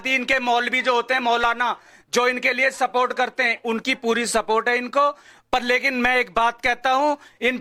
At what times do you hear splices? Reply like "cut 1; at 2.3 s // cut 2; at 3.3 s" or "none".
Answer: none